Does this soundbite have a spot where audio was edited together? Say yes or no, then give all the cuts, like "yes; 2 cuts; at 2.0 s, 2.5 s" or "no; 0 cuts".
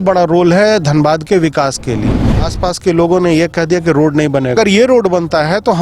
yes; 2 cuts; at 2.5 s, 4.5 s